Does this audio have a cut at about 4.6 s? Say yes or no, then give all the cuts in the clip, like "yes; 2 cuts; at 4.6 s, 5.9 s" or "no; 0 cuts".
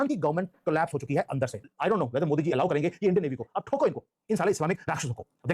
no; 1 cut; at 1.7 s